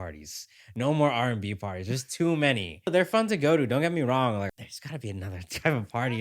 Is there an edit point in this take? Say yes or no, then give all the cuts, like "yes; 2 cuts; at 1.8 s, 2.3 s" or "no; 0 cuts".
yes; 2 cuts; at 2.9 s, 4.5 s